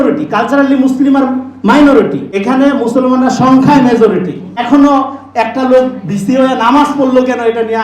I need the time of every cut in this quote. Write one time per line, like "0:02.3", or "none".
0:02.3
0:04.6